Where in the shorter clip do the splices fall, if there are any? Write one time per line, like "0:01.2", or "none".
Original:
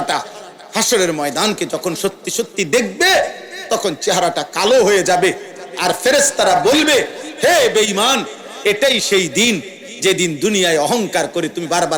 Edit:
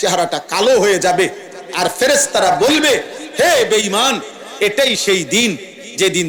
none